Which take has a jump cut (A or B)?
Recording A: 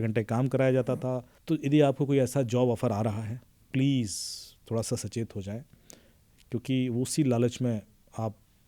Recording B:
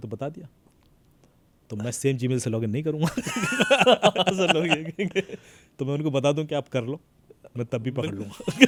A